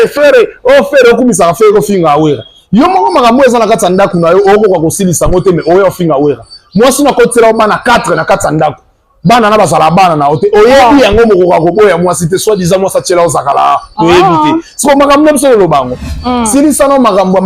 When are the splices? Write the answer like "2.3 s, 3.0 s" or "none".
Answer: 16.1 s